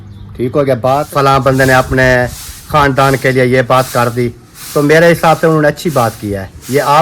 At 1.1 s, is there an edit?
yes; 1 cut; at 1.1 s

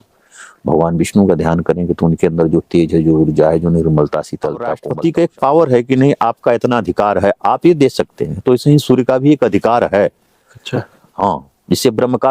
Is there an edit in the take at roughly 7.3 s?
no; 1 cut; at 4.8 s

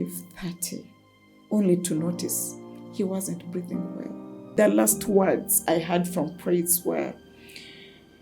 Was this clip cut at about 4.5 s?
yes; 1 cut; at 4.5 s

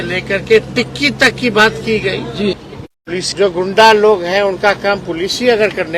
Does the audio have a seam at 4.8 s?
no; 1 cut; at 2.5 s

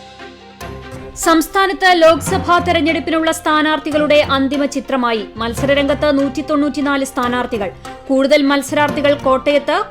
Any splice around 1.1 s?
yes; 1 cut; at 1.1 s

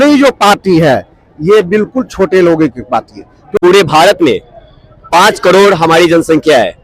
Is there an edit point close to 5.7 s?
no; 1 cut; at 3.5 s

